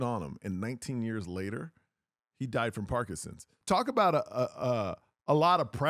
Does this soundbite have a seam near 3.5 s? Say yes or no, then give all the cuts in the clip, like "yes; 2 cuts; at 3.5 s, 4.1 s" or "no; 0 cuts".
yes; 1 cut; at 3.5 s